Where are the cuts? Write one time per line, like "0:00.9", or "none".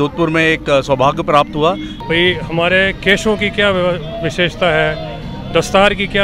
0:01.9